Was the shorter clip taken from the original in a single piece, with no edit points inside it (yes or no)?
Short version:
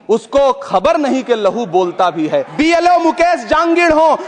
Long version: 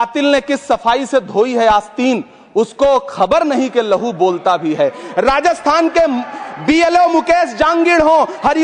no